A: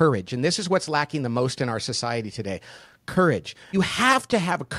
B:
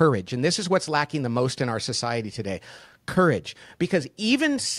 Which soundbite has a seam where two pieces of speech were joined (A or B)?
A